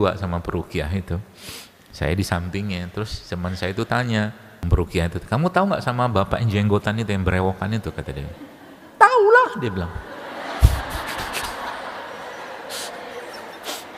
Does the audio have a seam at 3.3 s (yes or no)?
no